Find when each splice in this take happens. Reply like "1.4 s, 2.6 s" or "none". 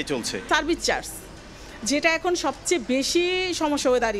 none